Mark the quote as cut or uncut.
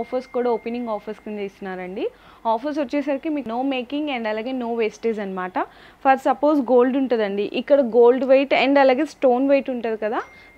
uncut